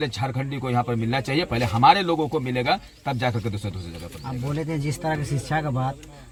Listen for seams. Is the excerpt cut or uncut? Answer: uncut